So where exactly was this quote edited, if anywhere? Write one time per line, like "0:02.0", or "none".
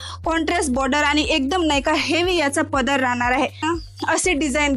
0:03.6